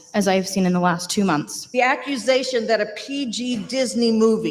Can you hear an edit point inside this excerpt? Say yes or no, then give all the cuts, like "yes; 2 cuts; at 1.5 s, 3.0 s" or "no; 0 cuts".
yes; 1 cut; at 1.6 s